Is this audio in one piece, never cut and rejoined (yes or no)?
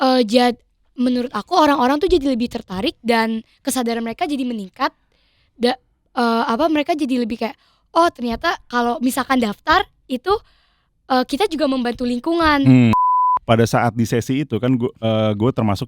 no